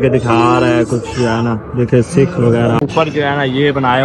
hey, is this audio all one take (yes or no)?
no